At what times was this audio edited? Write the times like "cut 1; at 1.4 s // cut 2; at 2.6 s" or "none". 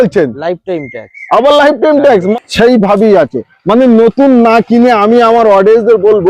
cut 1; at 2.3 s